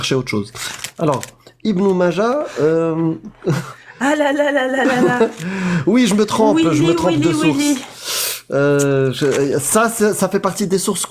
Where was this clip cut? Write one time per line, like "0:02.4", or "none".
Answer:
none